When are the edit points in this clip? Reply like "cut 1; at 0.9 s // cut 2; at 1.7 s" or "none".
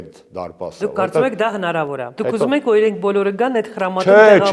cut 1; at 2.1 s